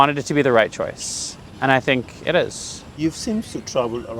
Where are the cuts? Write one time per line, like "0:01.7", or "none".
none